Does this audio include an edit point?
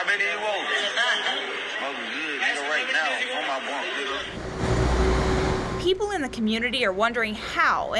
yes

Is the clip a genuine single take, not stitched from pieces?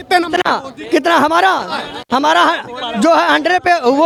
yes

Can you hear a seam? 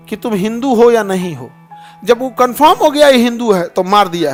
no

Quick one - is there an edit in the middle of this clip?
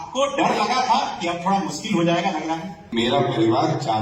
yes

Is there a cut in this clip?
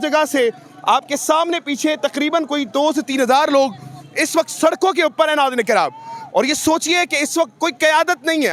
no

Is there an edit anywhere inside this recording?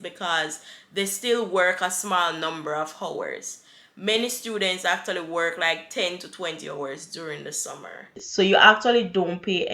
yes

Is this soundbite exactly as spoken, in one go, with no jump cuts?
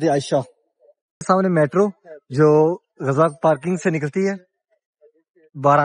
no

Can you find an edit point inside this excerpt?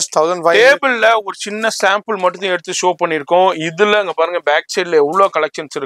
no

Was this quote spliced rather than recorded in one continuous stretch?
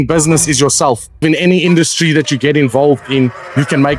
yes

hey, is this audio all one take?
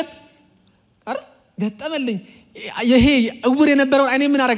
yes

